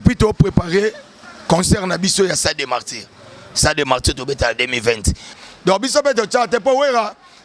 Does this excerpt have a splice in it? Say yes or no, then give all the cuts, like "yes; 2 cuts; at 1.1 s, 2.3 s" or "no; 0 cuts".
yes; 1 cut; at 5.4 s